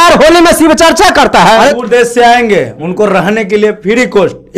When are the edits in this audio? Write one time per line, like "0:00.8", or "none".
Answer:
0:01.8